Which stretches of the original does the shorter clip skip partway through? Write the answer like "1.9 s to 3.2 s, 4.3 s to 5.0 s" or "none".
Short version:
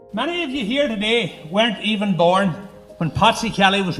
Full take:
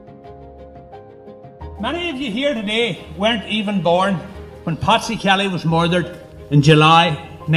none